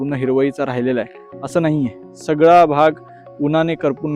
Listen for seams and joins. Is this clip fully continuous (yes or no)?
yes